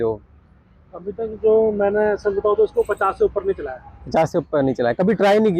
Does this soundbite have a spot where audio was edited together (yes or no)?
no